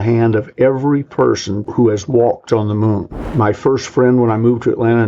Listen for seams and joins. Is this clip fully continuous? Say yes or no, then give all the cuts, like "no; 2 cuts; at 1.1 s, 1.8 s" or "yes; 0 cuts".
no; 1 cut; at 1.6 s